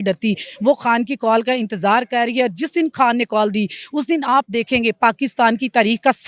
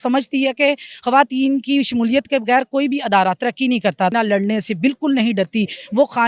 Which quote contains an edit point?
second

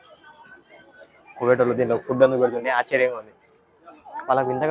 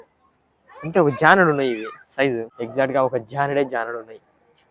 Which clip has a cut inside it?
second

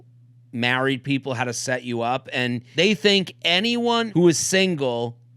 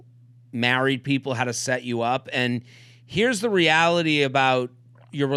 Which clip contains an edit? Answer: first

